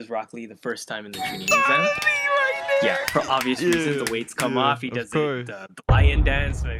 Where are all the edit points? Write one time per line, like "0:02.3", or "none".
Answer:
none